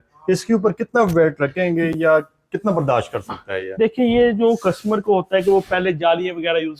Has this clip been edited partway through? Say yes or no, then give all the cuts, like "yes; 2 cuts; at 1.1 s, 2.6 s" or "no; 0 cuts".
no; 0 cuts